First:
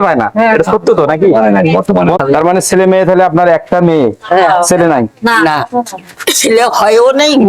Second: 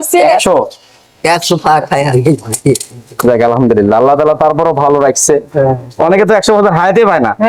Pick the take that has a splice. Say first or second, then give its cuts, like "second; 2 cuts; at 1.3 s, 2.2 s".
first; 1 cut; at 2.2 s